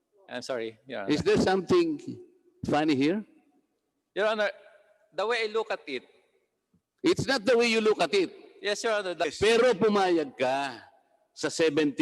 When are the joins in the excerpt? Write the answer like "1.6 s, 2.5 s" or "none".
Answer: 9.3 s